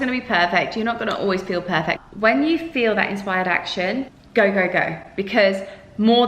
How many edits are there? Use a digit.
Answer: 2